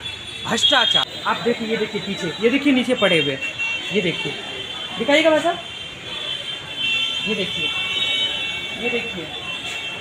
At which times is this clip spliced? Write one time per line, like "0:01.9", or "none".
0:01.1